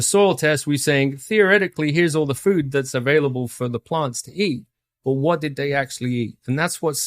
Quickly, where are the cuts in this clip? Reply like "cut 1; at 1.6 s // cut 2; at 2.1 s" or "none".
none